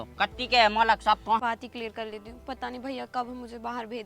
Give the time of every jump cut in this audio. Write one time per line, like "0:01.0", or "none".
0:01.4